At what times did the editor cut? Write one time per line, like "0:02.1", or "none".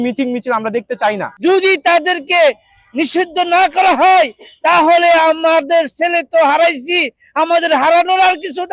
0:01.3